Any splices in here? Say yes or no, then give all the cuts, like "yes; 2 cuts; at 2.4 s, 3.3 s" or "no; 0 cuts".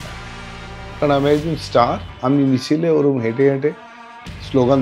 no; 0 cuts